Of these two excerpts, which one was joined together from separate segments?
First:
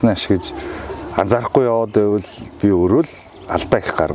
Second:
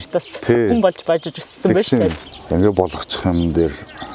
second; 1 cut; at 2.1 s

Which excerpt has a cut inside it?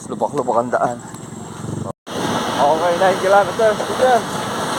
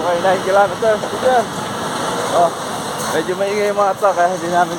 first; 1 cut; at 1.9 s

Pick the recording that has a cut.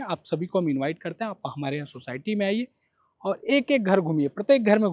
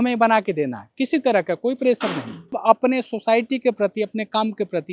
second; 1 cut; at 2.6 s

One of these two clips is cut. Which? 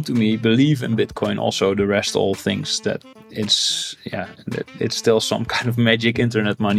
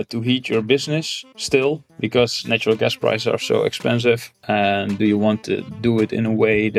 second; 2 cuts; at 1.9 s, 4.3 s

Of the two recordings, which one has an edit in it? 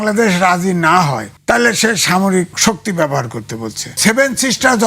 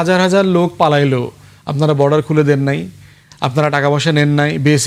first; 3 cuts; at 1.3 s, 2.5 s, 4.0 s

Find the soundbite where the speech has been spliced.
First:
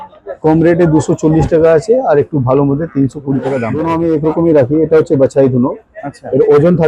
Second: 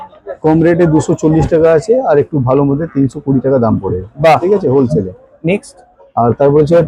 first; 1 cut; at 3.7 s

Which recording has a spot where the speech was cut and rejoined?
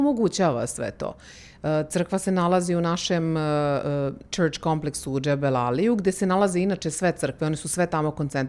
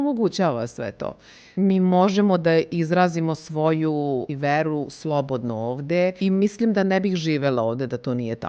second; 3 cuts; at 1.4 s, 4.3 s, 6.2 s

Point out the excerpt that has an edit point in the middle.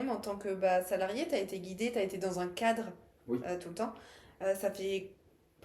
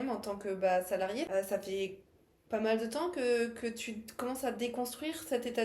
second; 1 cut; at 1.3 s

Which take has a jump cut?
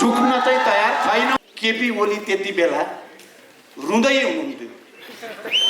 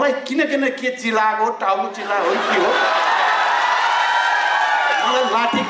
first; 1 cut; at 1.3 s

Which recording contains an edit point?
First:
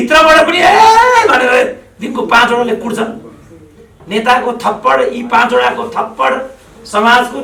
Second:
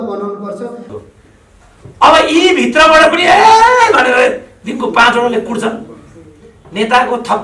second; 1 cut; at 0.9 s

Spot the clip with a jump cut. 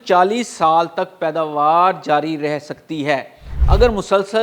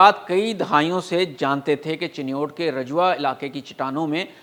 first; 1 cut; at 3.5 s

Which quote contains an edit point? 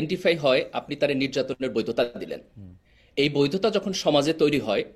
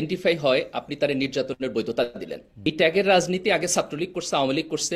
second; 1 cut; at 2.7 s

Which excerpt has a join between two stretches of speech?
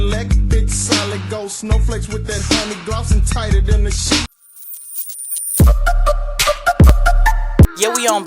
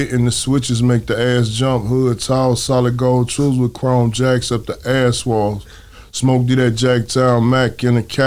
first; 1 cut; at 4.2 s

